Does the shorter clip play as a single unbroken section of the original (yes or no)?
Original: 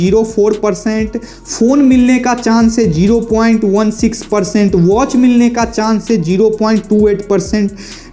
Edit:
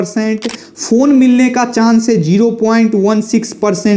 yes